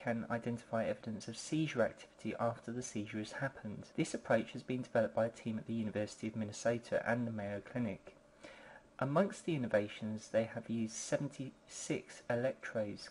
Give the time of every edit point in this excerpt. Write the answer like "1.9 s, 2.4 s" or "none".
none